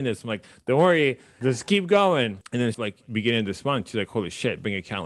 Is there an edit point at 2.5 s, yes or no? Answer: yes